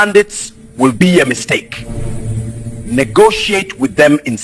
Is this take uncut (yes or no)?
yes